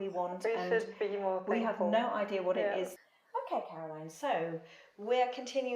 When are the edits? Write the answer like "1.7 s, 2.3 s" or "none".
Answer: 2.9 s